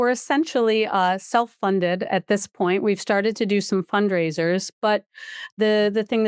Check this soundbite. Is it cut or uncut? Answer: uncut